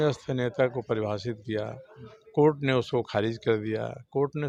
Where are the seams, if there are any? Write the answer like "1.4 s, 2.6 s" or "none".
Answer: none